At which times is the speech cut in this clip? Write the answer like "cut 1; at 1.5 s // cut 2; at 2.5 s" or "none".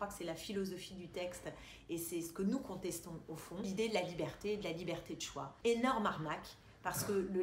cut 1; at 3.7 s // cut 2; at 5.4 s